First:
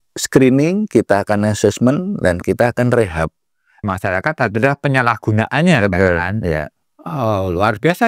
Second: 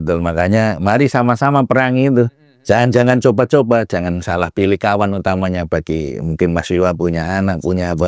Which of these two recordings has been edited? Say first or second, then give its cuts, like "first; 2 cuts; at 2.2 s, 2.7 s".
first; 1 cut; at 3.8 s